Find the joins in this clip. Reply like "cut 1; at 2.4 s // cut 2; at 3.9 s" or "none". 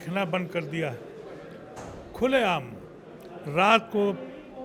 none

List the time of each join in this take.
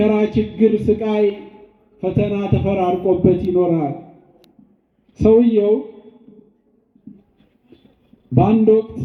none

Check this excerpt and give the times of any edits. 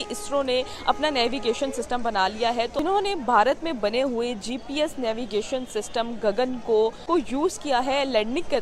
cut 1; at 2.7 s

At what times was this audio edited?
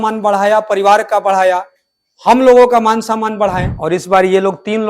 cut 1; at 3.7 s

